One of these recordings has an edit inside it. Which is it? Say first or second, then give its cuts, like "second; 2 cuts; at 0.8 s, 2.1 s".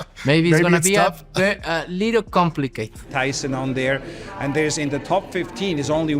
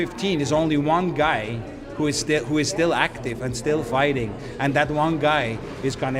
first; 1 cut; at 3.0 s